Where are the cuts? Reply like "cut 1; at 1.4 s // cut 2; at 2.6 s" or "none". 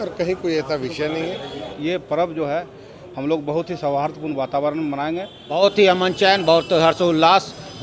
cut 1; at 1.7 s // cut 2; at 5.4 s